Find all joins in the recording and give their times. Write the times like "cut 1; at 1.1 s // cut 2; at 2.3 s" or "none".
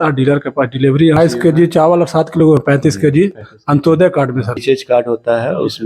cut 1; at 1.2 s // cut 2; at 4.6 s